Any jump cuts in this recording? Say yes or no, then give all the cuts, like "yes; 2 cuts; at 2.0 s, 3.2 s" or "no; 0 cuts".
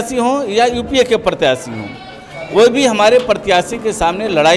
no; 0 cuts